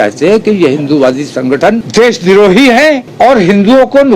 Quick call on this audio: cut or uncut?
cut